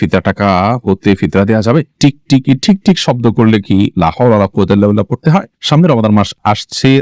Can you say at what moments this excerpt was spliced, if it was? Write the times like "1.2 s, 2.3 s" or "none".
1.9 s, 5.5 s